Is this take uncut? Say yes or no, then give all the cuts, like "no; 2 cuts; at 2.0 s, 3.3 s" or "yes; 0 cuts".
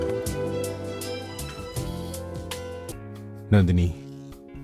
no; 1 cut; at 2.9 s